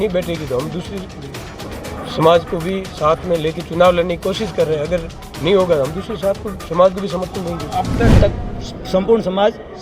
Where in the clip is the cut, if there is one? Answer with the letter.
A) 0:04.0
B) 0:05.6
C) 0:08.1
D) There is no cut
C